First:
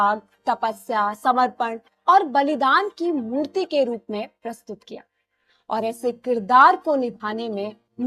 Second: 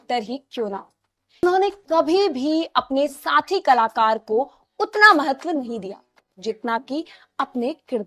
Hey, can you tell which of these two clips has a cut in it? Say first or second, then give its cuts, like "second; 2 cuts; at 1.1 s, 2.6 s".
second; 1 cut; at 1.4 s